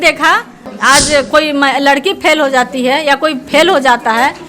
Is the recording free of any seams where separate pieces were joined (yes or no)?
no